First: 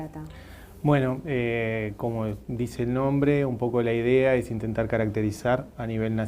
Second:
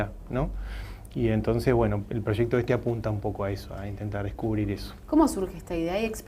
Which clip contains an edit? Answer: first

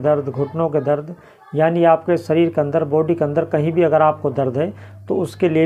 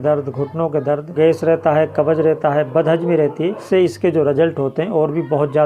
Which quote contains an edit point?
second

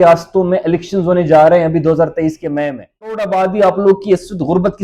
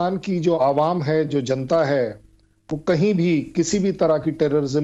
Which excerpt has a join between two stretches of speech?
first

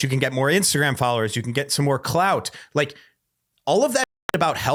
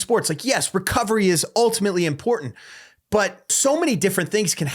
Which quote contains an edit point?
second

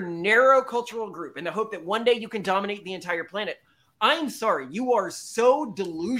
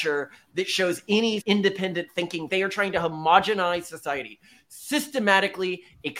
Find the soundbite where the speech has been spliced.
second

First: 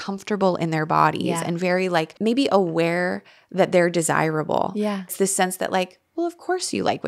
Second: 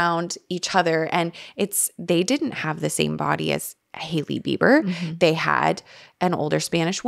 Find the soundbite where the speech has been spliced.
first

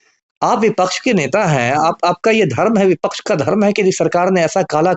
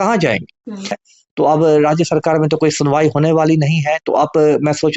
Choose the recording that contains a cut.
second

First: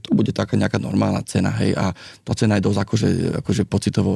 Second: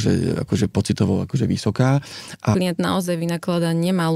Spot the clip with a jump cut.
second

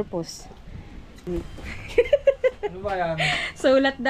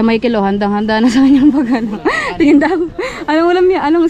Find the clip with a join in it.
first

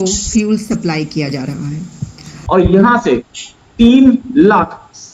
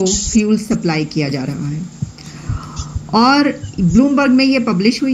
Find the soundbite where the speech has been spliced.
first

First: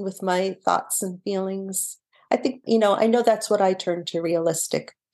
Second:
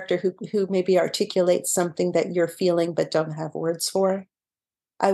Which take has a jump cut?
first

